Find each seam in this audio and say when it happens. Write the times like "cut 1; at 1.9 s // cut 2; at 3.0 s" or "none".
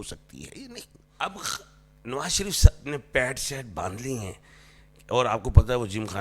cut 1; at 1.0 s

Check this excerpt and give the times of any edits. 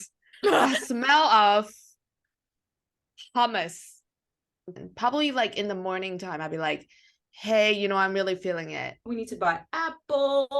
cut 1; at 4.8 s // cut 2; at 9.0 s

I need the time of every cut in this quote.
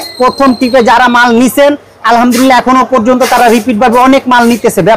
none

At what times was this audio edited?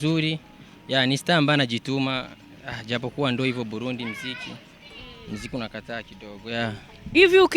none

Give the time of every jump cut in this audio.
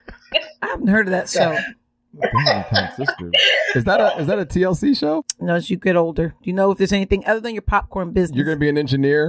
cut 1; at 5.3 s

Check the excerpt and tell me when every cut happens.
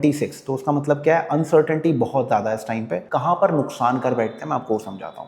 cut 1; at 3.0 s

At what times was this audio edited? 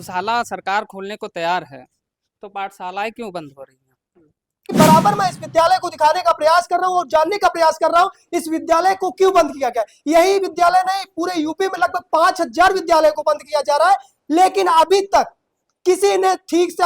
cut 1; at 4.7 s

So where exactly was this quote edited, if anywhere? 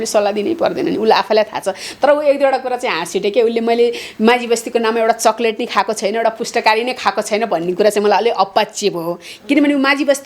none

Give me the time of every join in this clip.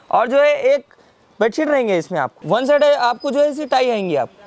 cut 1; at 2.4 s

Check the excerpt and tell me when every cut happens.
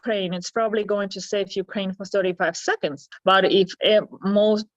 none

